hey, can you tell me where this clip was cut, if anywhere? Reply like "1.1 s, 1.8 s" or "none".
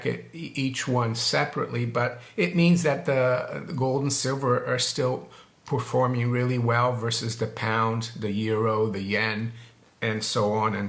none